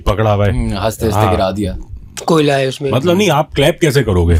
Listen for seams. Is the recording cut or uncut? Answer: uncut